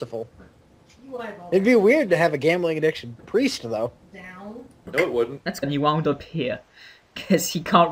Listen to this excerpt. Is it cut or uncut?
uncut